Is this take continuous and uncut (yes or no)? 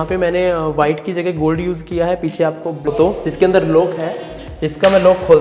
no